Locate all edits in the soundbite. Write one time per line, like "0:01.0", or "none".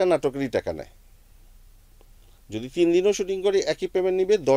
none